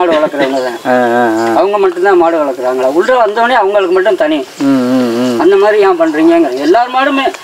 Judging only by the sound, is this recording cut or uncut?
uncut